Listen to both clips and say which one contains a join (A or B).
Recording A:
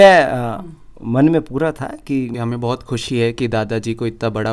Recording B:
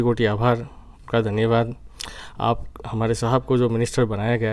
A